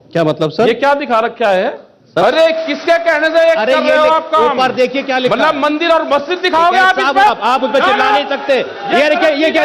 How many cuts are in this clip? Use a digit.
2